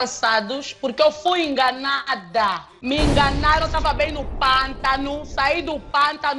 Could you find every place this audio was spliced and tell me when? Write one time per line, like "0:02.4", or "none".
0:02.7